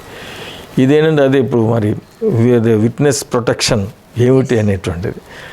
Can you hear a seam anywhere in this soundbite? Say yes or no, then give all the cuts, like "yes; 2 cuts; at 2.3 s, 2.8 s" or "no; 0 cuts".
no; 0 cuts